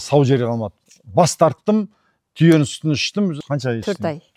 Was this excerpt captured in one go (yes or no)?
yes